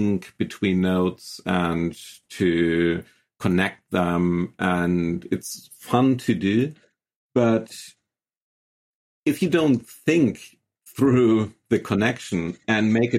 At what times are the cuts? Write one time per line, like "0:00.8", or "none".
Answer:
none